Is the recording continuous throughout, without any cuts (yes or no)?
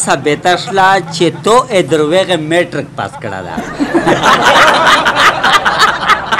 yes